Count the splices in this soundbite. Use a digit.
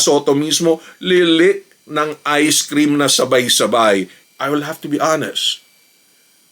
2